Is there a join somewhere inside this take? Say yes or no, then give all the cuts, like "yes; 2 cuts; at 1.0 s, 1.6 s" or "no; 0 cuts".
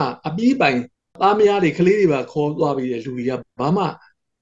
yes; 1 cut; at 1.1 s